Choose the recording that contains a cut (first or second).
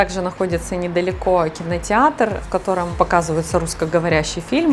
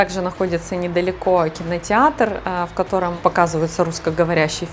first